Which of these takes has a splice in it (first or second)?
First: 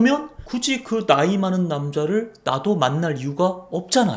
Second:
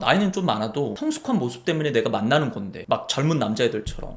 second